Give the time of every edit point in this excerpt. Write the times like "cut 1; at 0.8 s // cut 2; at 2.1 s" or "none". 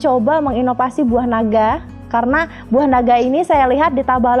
none